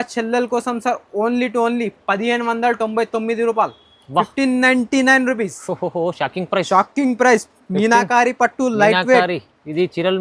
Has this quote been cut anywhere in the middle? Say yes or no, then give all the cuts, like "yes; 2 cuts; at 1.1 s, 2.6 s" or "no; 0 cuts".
no; 0 cuts